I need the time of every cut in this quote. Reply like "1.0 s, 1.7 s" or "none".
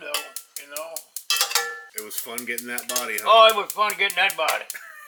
none

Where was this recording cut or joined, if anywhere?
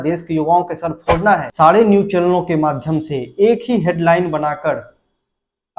1.5 s

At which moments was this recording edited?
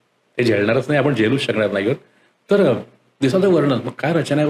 none

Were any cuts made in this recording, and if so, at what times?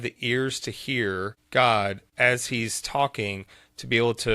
1.4 s, 2.0 s

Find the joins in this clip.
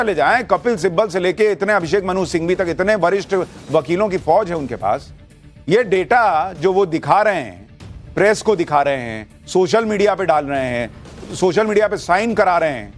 3.8 s

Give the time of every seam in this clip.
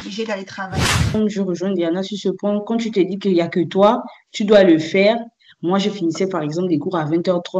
1.1 s

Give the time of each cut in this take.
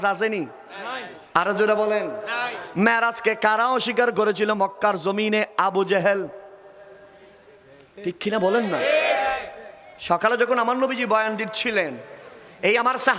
none

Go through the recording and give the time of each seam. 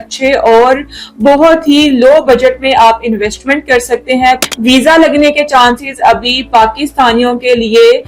4.4 s

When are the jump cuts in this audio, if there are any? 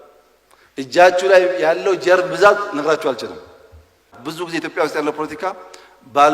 4.1 s

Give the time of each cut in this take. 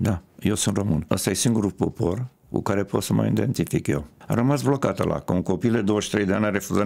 1.0 s, 4.1 s

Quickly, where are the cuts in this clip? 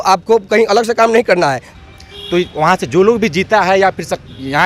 1.7 s

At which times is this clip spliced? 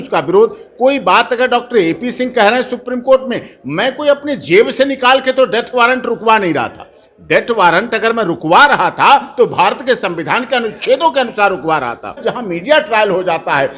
12.2 s

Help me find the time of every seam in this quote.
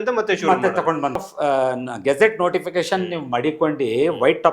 1.2 s

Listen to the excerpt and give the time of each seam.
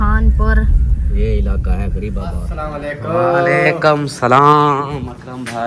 2.5 s

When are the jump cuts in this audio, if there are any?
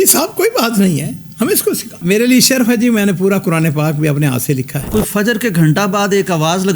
2.0 s, 4.8 s

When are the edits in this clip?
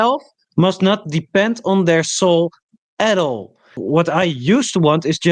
3.7 s

